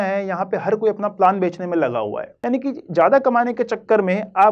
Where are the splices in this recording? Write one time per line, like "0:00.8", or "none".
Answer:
0:02.3